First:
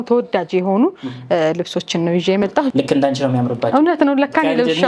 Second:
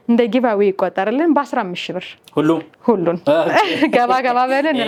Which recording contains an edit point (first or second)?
first